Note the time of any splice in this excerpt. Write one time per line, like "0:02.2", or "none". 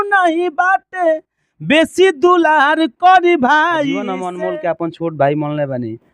0:04.2